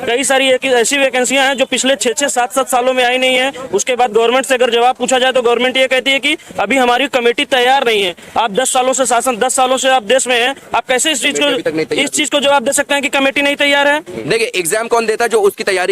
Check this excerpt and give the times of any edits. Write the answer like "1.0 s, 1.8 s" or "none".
14.1 s